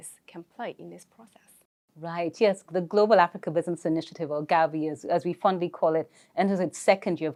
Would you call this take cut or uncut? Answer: uncut